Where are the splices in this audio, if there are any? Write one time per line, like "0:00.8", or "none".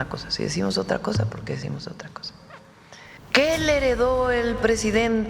0:03.2

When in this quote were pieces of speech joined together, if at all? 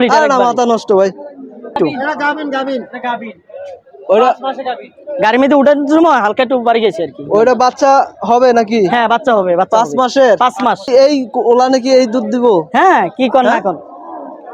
0:01.8
0:10.9

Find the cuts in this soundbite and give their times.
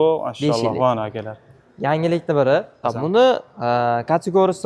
0:02.8

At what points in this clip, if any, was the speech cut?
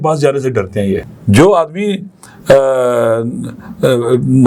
0:01.1

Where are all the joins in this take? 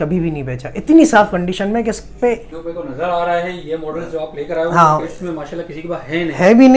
0:02.6

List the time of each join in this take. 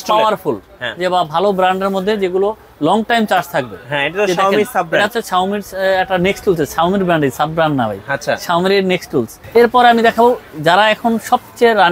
0:09.4

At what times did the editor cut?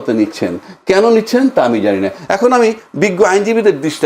none

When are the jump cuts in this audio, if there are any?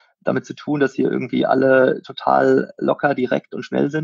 none

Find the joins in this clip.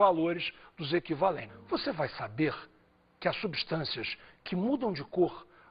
none

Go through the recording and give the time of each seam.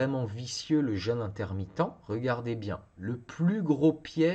0:02.0
0:02.9

